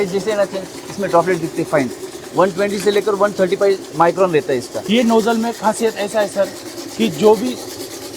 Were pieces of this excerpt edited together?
yes; 1 cut; at 4.7 s

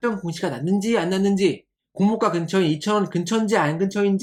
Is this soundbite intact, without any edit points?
yes; 0 cuts

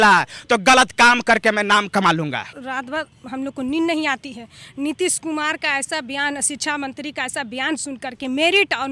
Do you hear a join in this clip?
yes; 1 cut; at 2.5 s

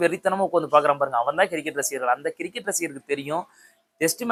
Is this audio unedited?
yes; 0 cuts

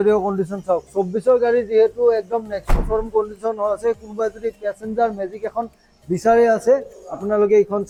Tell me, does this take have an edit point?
no; 0 cuts

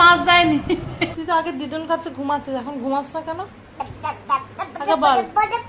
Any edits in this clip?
yes; 1 cut; at 1.1 s

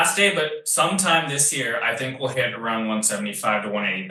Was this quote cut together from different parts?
no; 0 cuts

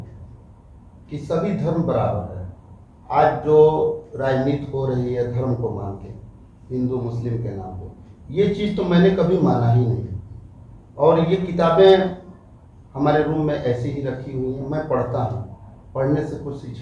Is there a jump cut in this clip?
no; 0 cuts

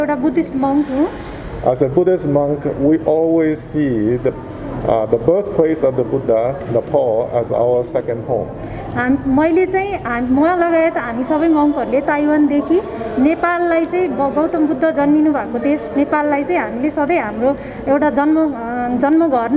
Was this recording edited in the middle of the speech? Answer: no; 0 cuts

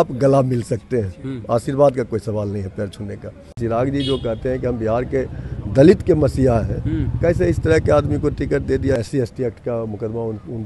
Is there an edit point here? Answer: yes; 2 cuts; at 3.5 s, 9.0 s

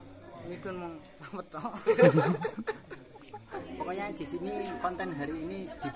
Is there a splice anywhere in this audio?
yes; 1 cut; at 3.7 s

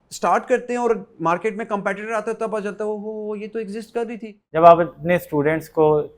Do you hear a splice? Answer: yes; 1 cut; at 4.4 s

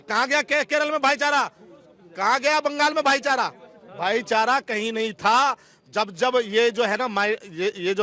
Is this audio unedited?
yes; 0 cuts

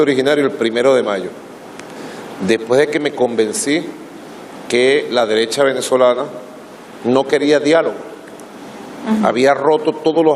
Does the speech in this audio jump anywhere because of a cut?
yes; 1 cut; at 2.8 s

